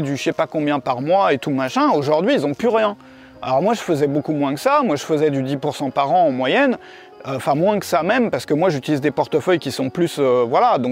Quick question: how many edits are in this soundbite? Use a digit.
0